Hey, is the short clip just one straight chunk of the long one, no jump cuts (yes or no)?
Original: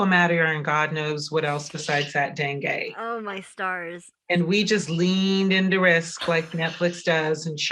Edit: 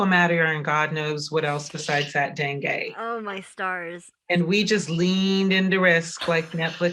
yes